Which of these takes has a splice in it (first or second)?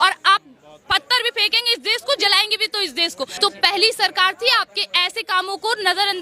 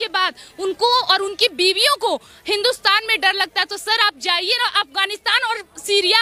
first